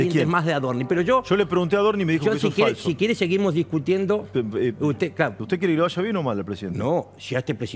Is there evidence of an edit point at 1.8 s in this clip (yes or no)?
no